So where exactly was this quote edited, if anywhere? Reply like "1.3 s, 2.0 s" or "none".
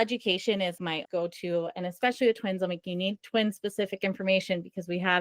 1.0 s